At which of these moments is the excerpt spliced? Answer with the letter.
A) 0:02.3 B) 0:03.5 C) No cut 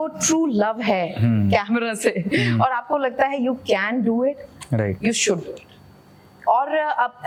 C